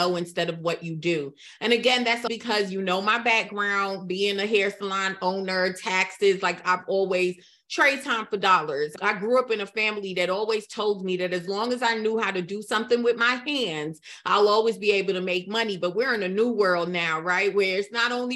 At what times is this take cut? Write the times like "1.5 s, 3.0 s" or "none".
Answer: 2.2 s, 8.9 s